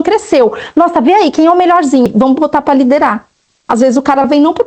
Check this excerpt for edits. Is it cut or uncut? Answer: cut